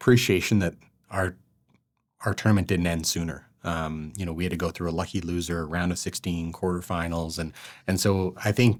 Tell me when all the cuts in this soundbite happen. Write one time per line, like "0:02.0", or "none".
none

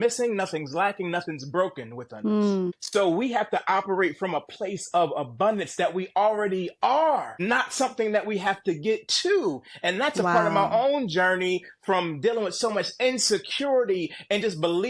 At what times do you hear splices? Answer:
0:02.6
0:07.3

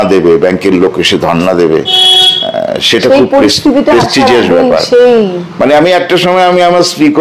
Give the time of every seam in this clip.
none

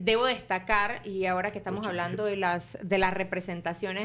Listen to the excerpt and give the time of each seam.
none

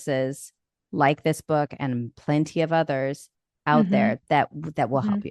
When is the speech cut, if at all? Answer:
none

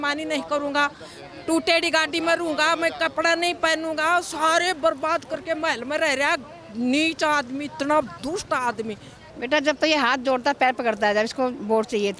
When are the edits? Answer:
0:09.2

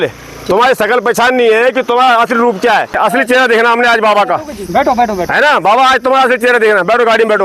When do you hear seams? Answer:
0:03.0

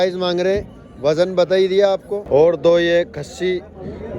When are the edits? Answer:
0:02.1

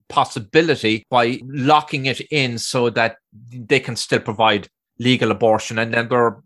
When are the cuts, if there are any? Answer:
0:01.0

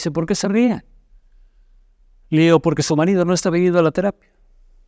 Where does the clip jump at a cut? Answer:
none

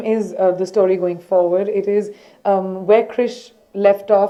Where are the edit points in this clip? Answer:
none

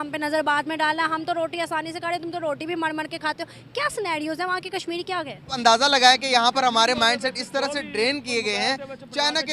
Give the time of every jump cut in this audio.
0:05.5

